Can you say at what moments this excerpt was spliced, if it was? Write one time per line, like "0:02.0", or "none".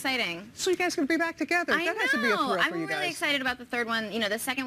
0:02.4